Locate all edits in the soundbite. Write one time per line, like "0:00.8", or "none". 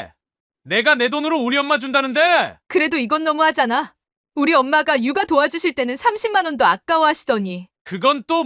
0:02.6